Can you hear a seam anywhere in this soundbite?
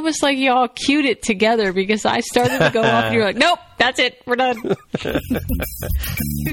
no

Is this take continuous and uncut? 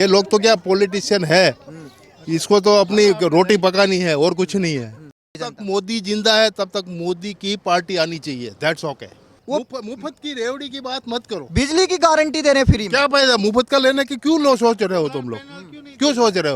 no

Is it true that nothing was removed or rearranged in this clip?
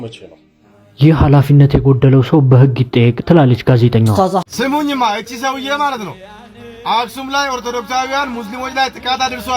no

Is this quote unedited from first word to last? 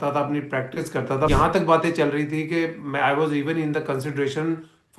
no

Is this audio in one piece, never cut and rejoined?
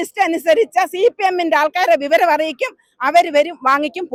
yes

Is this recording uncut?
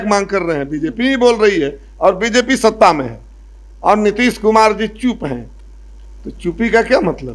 yes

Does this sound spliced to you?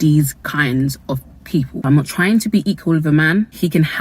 yes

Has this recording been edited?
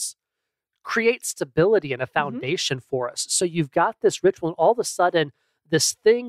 no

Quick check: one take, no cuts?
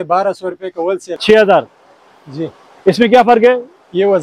no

